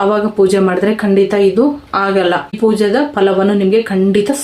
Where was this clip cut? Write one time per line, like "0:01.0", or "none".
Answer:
0:02.6